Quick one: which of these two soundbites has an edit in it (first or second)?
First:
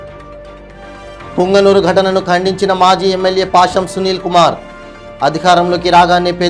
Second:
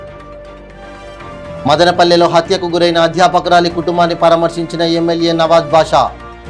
second